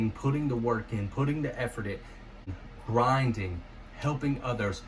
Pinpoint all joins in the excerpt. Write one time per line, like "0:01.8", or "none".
0:02.5